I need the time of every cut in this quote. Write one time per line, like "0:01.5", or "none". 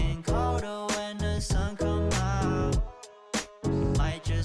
none